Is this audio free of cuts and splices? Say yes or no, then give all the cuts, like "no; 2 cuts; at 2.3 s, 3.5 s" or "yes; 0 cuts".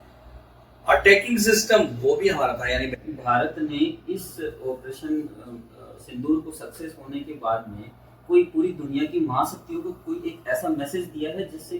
no; 1 cut; at 2.9 s